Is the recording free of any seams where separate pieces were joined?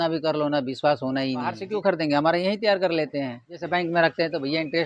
no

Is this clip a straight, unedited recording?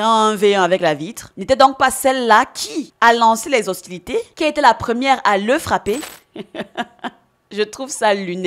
no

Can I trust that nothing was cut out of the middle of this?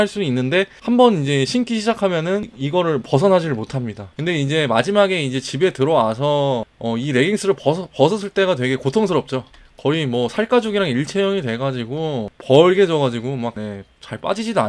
yes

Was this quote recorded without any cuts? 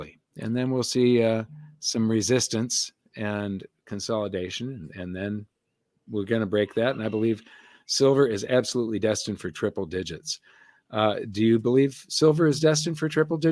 yes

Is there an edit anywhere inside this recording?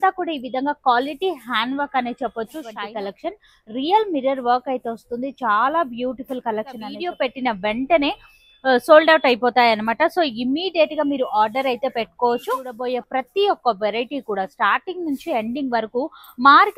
yes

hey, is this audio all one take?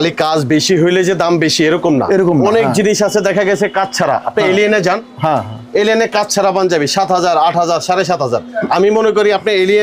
yes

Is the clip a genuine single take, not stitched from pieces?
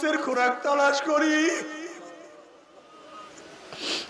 yes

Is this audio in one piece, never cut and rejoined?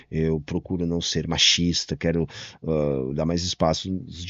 yes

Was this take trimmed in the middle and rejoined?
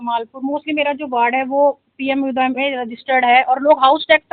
no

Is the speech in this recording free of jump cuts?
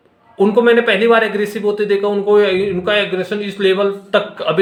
yes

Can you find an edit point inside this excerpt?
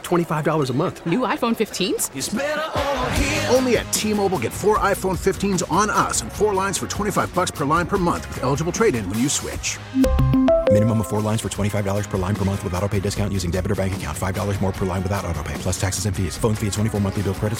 no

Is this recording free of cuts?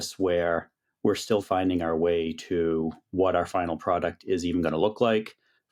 yes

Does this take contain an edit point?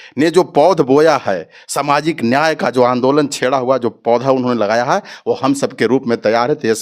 no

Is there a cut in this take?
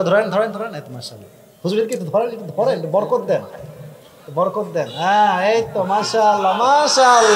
no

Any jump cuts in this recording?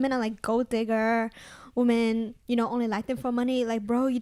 no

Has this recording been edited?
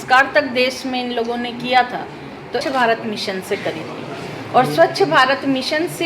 yes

